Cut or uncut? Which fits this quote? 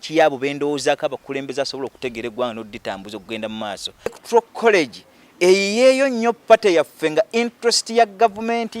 cut